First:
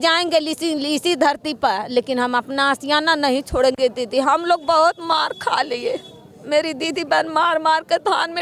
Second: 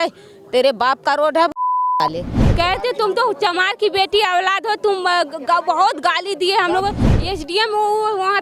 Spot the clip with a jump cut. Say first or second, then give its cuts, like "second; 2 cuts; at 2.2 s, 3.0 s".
second; 2 cuts; at 2.4 s, 7.1 s